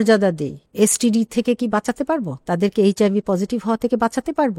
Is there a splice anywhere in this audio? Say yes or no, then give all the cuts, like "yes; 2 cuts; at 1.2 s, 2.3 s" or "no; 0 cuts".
no; 0 cuts